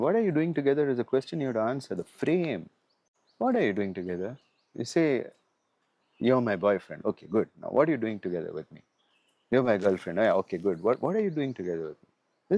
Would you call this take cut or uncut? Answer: uncut